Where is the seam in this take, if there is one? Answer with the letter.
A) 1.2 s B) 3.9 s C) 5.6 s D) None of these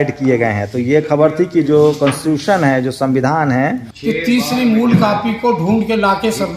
B